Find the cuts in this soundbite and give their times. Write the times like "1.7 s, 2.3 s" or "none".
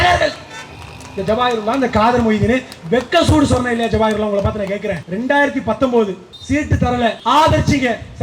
5.0 s, 6.8 s